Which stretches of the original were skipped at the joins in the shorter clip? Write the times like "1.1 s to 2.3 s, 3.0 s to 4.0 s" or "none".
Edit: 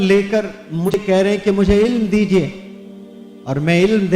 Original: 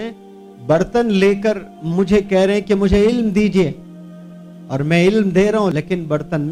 2.1 s to 2.2 s